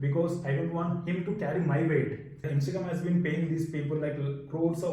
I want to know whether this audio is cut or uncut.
cut